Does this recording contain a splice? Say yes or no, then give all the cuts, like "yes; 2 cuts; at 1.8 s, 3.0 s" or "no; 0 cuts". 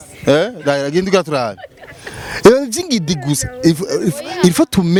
no; 0 cuts